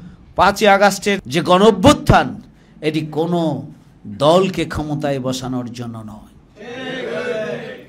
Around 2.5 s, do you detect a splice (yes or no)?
no